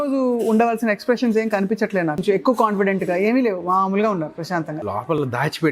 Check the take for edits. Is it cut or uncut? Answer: cut